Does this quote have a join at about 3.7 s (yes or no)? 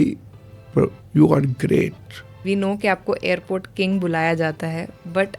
no